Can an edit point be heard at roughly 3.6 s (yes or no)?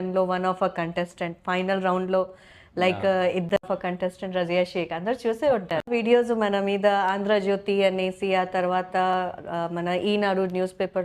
yes